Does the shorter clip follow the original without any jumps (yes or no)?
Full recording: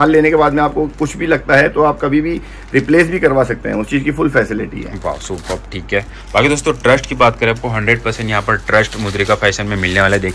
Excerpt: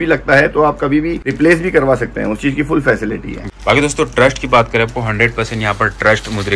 no